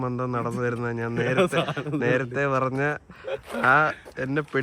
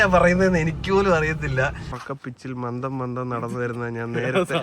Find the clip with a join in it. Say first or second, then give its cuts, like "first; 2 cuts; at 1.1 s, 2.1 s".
second; 1 cut; at 1.9 s